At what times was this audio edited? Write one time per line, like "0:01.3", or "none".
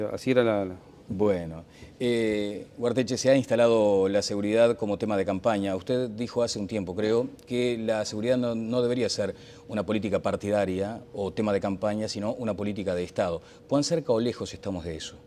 none